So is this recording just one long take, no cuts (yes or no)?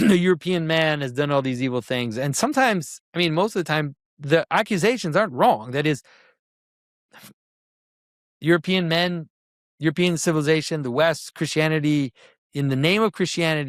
yes